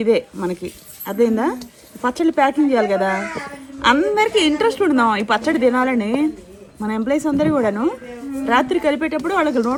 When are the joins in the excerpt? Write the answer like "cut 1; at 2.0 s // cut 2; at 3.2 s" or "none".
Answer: none